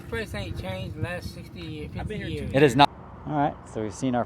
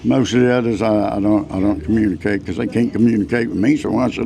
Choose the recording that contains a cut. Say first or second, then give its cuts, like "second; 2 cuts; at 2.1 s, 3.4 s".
first; 1 cut; at 2.9 s